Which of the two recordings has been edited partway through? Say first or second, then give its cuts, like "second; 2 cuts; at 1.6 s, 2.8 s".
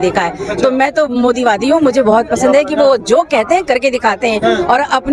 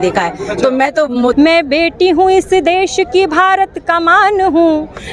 second; 1 cut; at 1.3 s